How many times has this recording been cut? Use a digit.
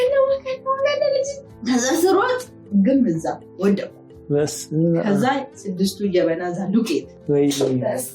2